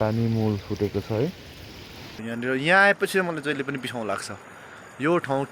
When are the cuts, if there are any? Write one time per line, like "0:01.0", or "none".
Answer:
0:02.2